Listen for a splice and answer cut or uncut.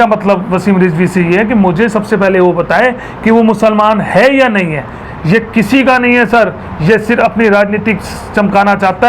cut